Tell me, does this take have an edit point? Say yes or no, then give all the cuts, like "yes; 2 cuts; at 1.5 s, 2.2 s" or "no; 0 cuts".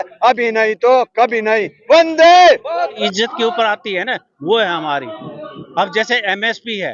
yes; 1 cut; at 3.0 s